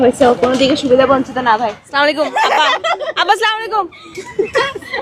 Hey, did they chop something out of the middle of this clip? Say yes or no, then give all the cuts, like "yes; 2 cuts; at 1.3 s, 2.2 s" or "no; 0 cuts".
no; 0 cuts